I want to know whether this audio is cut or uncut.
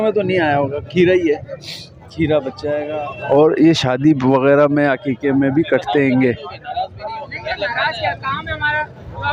cut